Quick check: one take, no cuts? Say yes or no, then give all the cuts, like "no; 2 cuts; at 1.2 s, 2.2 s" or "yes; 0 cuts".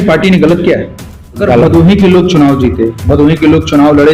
no; 1 cut; at 1.4 s